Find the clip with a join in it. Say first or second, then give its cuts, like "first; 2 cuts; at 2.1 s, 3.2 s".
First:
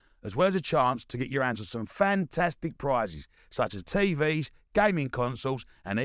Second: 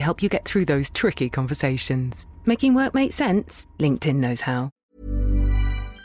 second; 1 cut; at 4.8 s